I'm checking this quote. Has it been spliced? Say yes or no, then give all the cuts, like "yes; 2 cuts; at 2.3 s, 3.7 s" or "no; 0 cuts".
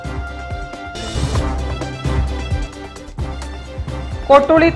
yes; 1 cut; at 3.4 s